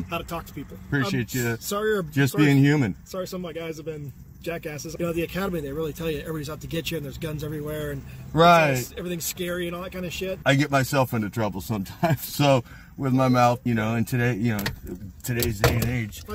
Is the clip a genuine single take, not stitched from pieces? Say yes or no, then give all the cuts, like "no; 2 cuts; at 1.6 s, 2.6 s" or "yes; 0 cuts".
no; 4 cuts; at 0.9 s, 4.8 s, 10.4 s, 13.6 s